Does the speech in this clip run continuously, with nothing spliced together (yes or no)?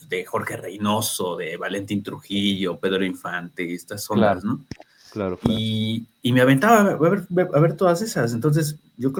yes